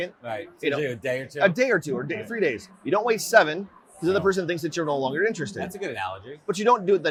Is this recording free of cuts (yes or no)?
yes